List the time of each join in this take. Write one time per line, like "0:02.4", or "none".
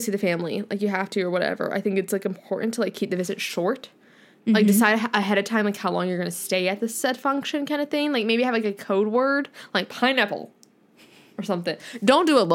none